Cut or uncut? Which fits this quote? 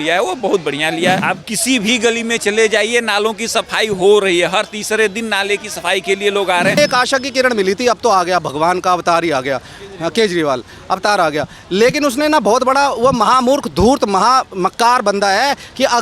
cut